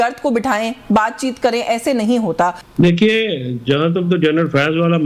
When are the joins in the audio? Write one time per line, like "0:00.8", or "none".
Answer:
0:02.6

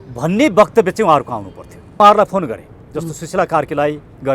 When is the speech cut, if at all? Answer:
0:02.0

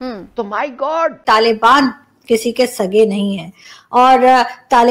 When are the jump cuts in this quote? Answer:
0:01.2

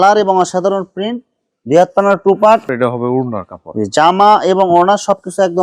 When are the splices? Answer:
0:02.7

